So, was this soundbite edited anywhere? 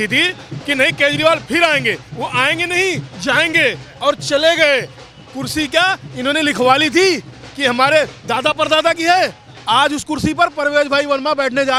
no; 0 cuts

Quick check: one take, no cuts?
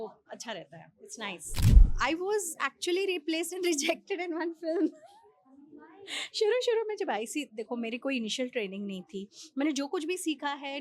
no; 1 cut; at 1.9 s

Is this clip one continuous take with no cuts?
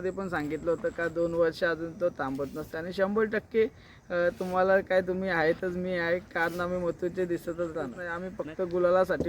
no; 1 cut; at 8.3 s

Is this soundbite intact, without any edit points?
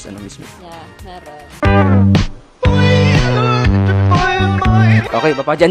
yes; 0 cuts

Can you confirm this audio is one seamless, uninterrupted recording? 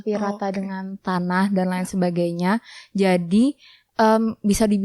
yes; 0 cuts

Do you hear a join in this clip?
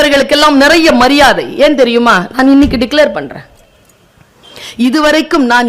no; 0 cuts

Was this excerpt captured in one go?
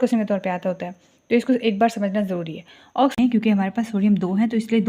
no; 1 cut; at 3.1 s

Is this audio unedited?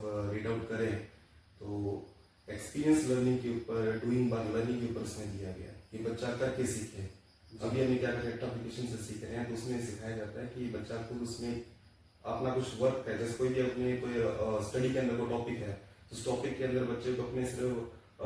yes; 0 cuts

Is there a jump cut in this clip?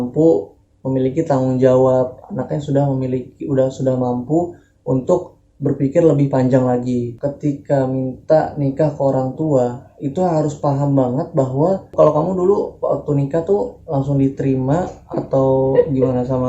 yes; 2 cuts; at 7.1 s, 11.9 s

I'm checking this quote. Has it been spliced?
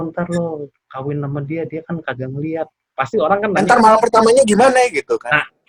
no; 0 cuts

